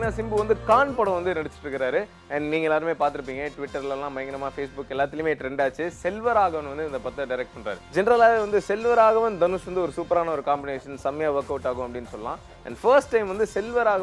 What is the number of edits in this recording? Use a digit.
0